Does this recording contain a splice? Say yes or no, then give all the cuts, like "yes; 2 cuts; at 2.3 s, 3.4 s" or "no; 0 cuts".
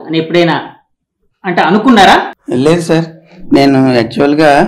yes; 1 cut; at 2.3 s